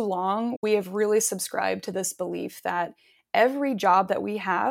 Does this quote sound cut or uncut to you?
uncut